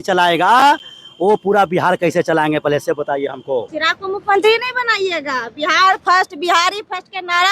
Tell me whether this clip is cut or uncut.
cut